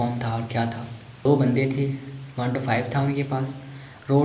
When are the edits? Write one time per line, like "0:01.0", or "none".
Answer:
0:01.2